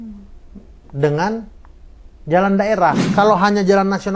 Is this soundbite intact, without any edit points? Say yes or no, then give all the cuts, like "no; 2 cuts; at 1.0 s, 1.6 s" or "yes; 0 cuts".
no; 1 cut; at 3.0 s